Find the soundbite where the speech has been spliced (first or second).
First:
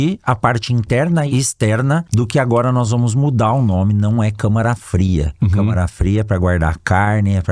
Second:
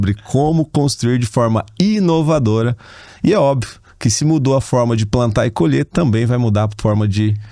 first